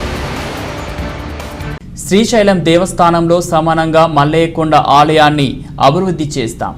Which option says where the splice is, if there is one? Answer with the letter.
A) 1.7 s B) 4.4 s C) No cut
A